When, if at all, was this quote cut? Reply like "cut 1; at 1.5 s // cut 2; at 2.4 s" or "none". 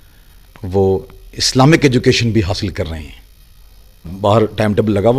cut 1; at 4.1 s